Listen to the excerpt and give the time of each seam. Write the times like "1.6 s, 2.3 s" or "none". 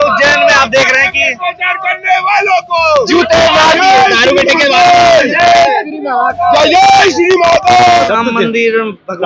3.7 s, 7.9 s